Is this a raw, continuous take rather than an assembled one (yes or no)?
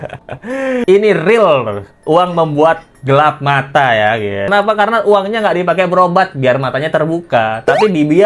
no